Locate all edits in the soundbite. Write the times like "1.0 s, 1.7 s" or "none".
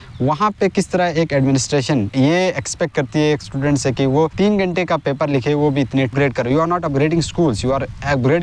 2.1 s, 4.3 s, 6.1 s